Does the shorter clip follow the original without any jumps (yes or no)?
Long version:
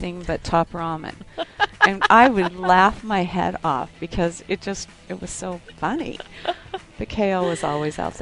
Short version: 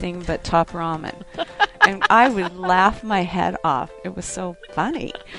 no